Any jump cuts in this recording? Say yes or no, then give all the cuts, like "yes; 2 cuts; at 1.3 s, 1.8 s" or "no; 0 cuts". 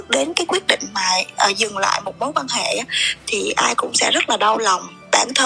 no; 0 cuts